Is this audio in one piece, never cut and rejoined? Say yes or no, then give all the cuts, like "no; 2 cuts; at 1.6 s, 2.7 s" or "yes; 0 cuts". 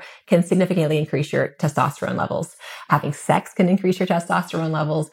yes; 0 cuts